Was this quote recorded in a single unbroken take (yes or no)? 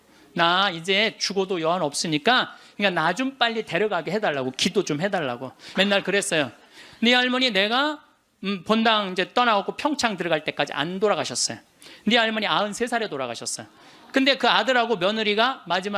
no